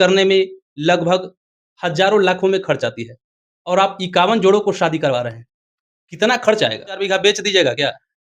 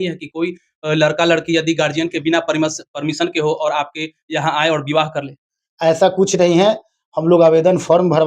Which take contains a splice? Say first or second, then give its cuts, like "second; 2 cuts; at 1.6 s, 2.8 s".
first; 1 cut; at 7.0 s